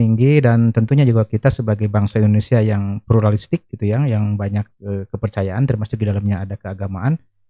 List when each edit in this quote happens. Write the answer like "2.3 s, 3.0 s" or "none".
none